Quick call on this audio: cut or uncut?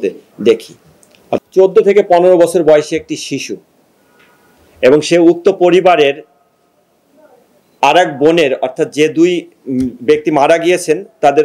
cut